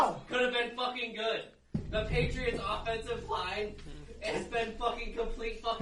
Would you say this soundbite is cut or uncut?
uncut